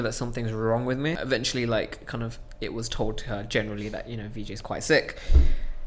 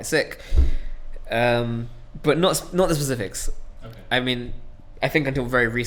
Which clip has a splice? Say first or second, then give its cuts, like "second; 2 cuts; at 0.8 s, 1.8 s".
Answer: first; 1 cut; at 1.2 s